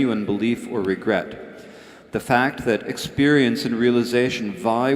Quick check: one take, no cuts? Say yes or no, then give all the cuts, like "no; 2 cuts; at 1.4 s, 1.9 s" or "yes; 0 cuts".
no; 1 cut; at 2.1 s